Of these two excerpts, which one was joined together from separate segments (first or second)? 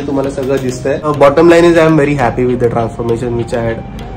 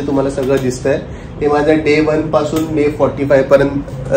first